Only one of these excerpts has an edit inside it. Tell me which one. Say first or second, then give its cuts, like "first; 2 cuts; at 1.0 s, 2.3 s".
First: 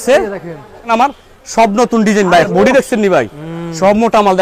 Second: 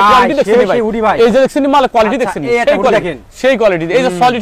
first; 2 cuts; at 0.8 s, 2.5 s